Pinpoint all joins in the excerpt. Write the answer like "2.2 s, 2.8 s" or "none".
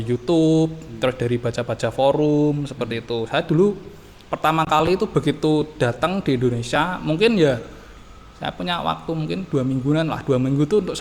none